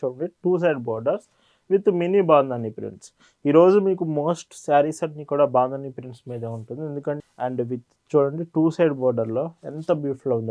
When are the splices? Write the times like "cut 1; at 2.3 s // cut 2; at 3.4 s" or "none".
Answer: cut 1; at 7.2 s